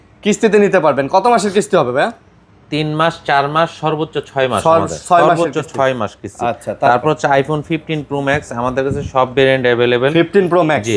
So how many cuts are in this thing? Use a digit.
0